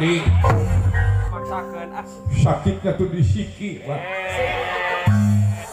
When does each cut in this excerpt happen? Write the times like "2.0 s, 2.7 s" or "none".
1.3 s